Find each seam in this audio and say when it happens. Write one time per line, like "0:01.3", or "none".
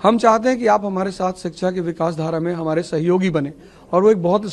none